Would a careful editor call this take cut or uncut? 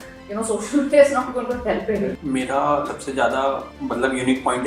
cut